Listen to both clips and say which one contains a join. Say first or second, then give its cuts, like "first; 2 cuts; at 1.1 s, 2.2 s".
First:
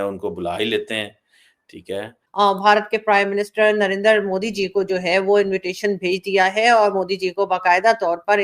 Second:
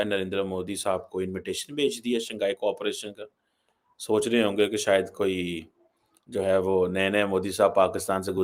first; 1 cut; at 2.2 s